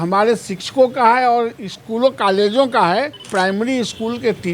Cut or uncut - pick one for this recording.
cut